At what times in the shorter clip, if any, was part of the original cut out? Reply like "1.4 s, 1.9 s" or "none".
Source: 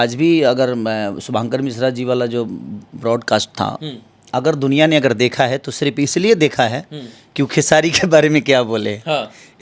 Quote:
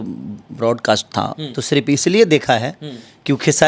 1.6 s